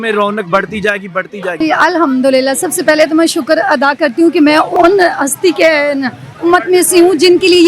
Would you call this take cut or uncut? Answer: cut